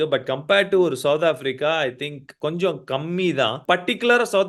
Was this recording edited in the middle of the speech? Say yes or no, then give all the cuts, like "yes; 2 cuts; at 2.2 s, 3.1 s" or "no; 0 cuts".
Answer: yes; 2 cuts; at 2.3 s, 3.6 s